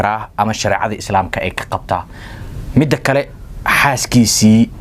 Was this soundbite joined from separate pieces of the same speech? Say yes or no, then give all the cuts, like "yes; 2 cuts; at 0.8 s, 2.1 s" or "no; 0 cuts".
no; 0 cuts